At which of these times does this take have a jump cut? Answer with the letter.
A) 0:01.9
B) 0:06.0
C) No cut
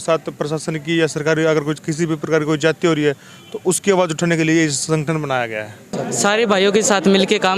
B